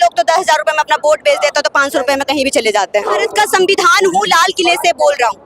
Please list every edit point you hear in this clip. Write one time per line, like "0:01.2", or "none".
0:03.3